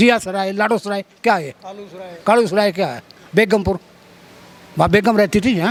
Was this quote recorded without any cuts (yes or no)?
yes